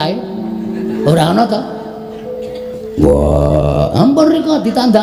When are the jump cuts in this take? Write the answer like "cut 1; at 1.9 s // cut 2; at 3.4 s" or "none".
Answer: none